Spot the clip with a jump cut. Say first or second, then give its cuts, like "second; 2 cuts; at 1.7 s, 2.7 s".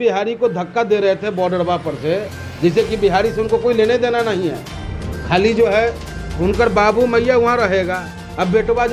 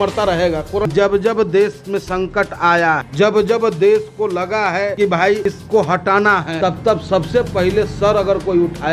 second; 4 cuts; at 0.9 s, 3.1 s, 5.2 s, 6.5 s